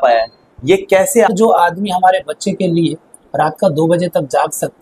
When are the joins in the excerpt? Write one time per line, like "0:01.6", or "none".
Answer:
0:01.3